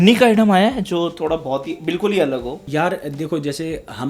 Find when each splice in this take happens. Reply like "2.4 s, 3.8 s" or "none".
none